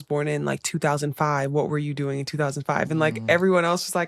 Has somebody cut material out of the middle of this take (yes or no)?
no